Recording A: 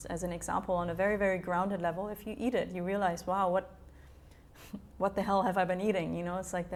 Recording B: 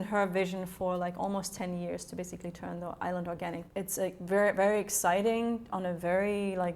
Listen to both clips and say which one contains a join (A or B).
B